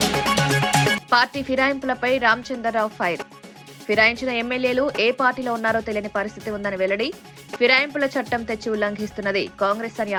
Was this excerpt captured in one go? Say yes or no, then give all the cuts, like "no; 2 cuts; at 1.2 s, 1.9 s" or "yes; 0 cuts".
yes; 0 cuts